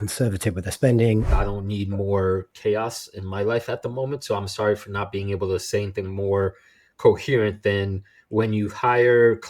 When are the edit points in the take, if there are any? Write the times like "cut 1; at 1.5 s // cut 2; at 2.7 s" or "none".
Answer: cut 1; at 1.3 s